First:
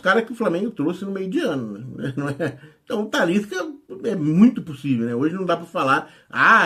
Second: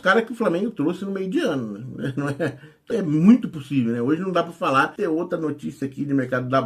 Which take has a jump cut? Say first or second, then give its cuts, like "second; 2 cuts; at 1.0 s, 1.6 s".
second; 2 cuts; at 2.7 s, 4.9 s